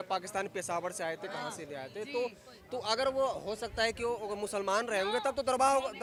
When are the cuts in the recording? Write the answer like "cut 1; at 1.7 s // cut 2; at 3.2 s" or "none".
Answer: none